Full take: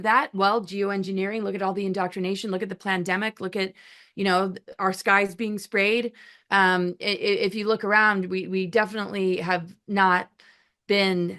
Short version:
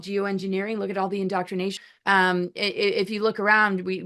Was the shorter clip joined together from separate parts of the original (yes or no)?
yes